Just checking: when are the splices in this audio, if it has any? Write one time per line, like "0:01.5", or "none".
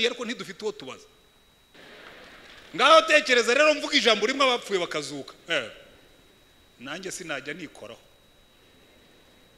0:01.7